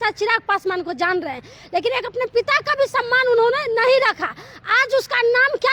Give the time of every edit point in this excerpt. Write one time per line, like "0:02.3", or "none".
none